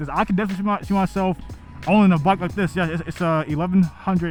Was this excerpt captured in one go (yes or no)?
yes